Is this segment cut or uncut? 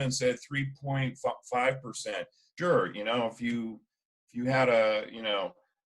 cut